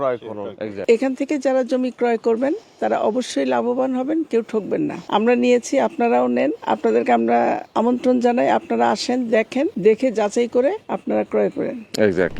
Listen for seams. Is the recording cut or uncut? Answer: cut